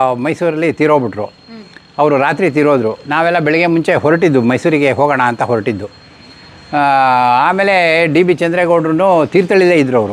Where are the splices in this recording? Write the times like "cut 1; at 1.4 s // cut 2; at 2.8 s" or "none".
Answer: none